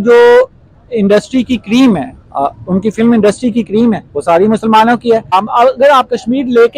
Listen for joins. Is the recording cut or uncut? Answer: cut